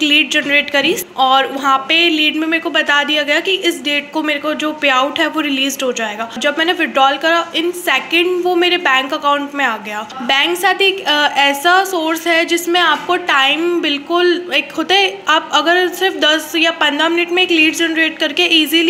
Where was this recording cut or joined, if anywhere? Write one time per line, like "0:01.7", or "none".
0:01.0
0:06.4
0:10.1